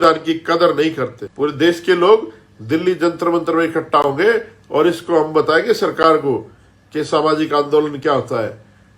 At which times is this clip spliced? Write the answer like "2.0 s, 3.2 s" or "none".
1.2 s